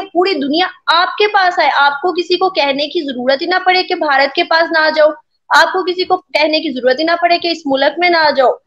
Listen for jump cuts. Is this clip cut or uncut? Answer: uncut